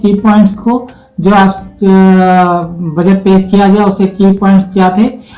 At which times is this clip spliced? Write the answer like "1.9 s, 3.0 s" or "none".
none